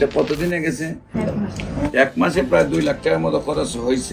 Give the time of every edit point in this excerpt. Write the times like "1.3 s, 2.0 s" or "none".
1.1 s